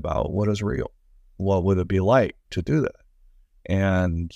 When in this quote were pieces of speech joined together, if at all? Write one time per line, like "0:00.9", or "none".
none